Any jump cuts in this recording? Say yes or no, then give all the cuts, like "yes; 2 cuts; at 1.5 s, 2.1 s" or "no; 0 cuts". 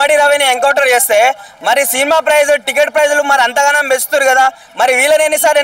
no; 0 cuts